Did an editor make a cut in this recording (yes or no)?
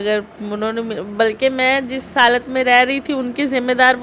no